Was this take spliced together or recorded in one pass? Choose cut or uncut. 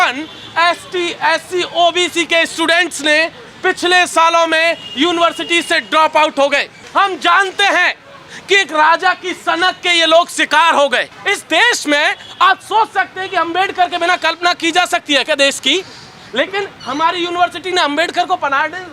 cut